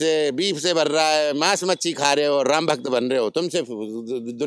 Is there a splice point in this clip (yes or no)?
no